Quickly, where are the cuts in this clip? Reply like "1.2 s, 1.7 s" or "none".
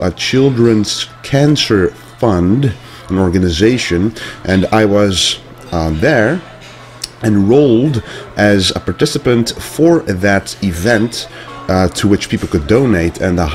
4.4 s